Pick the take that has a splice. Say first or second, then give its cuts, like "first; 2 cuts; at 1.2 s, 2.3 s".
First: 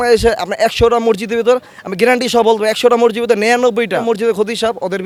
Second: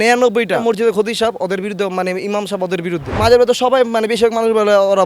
second; 1 cut; at 3.0 s